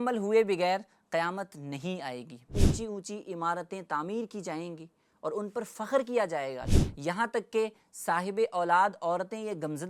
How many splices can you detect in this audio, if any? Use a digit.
2